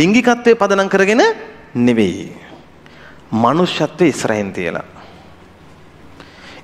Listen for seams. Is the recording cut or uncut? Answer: uncut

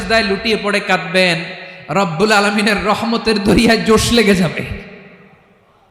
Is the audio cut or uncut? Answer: uncut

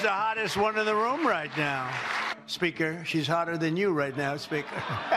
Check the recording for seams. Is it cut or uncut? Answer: cut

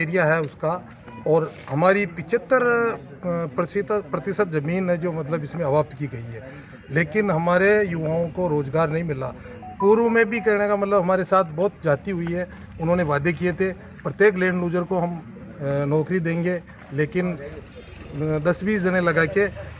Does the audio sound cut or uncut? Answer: uncut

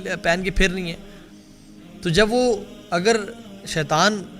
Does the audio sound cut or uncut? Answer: uncut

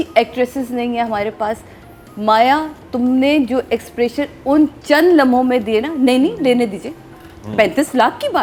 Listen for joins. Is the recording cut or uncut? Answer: uncut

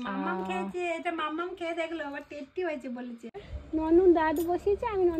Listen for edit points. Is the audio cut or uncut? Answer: cut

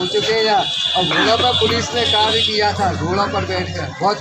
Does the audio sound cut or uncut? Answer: uncut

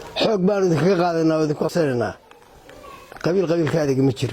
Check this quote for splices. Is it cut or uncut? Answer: cut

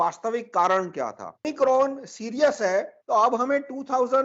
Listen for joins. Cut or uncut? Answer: cut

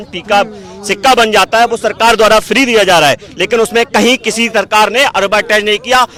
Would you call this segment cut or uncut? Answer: uncut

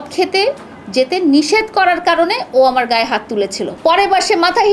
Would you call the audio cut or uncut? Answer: cut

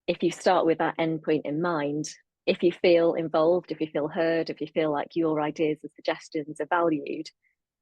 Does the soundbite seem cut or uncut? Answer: cut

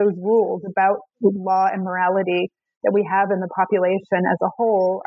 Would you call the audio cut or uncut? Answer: uncut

